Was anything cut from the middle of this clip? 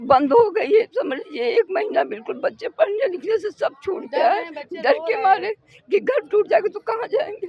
no; 0 cuts

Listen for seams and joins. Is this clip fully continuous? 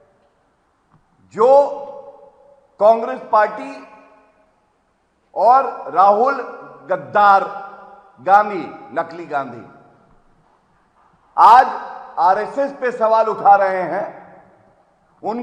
yes; 0 cuts

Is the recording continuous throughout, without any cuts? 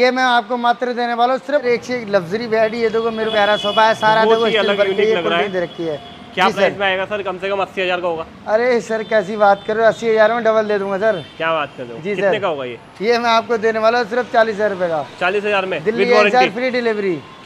no; 2 cuts; at 1.6 s, 3.3 s

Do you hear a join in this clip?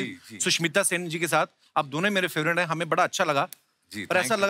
no; 0 cuts

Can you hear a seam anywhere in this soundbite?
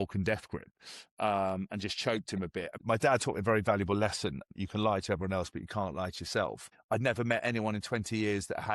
yes; 3 cuts; at 2.8 s, 4.5 s, 6.7 s

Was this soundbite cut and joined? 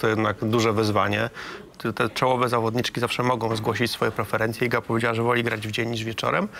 yes; 1 cut; at 1.6 s

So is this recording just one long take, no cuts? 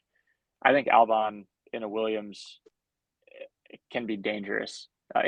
yes; 0 cuts

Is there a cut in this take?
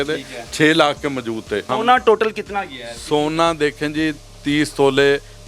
yes; 1 cut; at 1.7 s

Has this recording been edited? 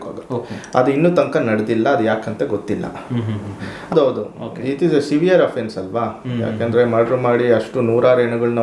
yes; 1 cut; at 3.9 s

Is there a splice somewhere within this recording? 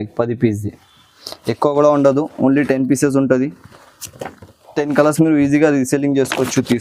no; 0 cuts

